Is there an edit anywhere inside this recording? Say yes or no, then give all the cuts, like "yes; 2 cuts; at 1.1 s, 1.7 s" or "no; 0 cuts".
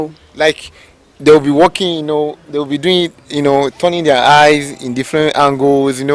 no; 0 cuts